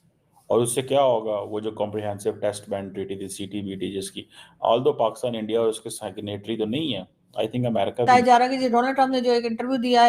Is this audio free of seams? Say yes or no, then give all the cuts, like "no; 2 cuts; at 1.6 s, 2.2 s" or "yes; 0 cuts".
no; 1 cut; at 8.0 s